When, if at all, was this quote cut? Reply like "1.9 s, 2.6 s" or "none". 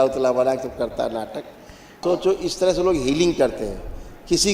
2.0 s